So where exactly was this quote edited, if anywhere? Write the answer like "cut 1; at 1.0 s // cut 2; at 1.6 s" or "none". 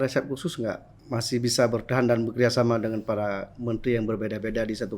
cut 1; at 0.9 s